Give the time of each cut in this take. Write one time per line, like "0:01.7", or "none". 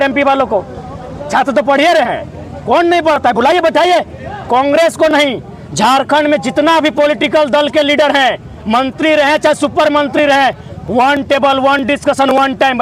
none